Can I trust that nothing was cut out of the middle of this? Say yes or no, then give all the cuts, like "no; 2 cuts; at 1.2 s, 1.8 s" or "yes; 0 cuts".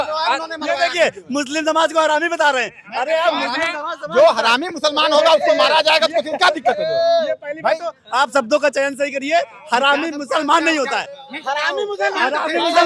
yes; 0 cuts